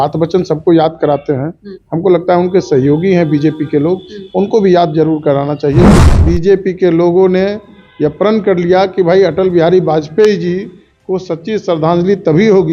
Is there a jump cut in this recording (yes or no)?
yes